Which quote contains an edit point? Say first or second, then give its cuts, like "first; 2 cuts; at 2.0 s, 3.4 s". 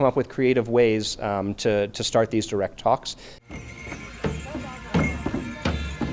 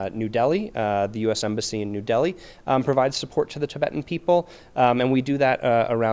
first; 1 cut; at 3.3 s